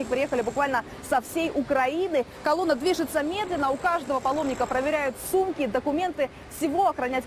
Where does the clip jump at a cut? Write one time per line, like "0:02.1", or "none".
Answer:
0:02.3